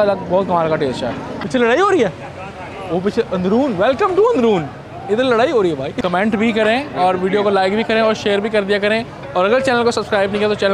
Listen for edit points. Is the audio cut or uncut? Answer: cut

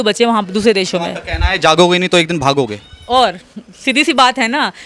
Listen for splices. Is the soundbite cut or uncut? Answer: uncut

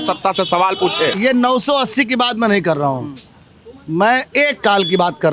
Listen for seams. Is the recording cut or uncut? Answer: cut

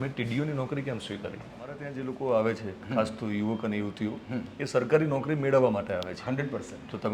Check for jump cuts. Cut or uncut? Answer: cut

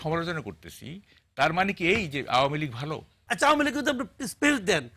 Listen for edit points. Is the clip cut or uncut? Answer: cut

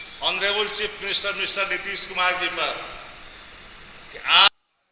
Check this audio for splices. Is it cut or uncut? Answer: uncut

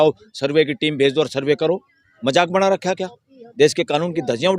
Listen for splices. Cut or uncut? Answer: cut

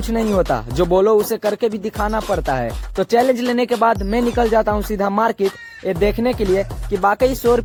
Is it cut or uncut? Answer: uncut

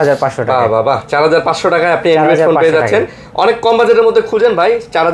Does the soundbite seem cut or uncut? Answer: uncut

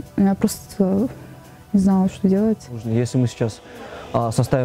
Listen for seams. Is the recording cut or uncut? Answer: cut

